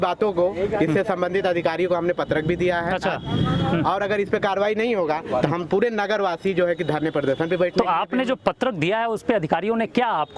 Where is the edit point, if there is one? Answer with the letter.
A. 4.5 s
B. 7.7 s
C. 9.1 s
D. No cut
D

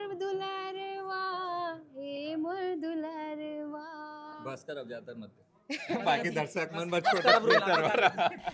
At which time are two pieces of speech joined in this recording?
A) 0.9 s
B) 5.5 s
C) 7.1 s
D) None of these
D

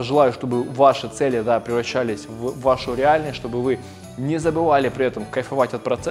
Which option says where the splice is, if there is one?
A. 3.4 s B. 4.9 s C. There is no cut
C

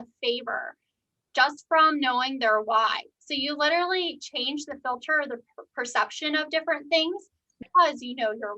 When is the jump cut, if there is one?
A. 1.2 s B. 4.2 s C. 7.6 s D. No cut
C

